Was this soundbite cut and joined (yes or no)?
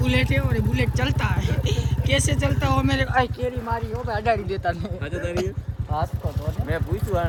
no